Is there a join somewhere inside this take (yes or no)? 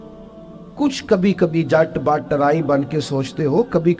no